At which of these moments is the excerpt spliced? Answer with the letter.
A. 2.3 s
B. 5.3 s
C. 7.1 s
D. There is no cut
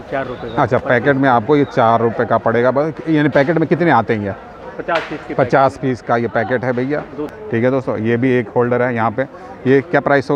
C